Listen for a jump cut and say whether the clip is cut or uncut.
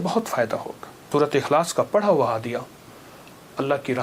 cut